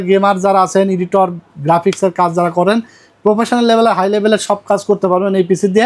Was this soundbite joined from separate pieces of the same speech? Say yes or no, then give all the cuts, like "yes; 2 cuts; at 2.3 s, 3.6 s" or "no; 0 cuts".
no; 0 cuts